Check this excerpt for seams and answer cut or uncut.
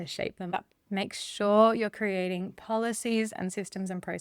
uncut